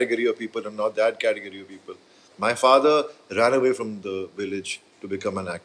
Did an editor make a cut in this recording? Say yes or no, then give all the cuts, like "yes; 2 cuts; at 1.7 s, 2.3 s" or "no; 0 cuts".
yes; 1 cut; at 2.3 s